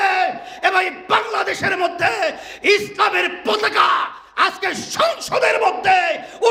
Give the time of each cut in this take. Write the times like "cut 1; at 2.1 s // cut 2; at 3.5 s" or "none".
none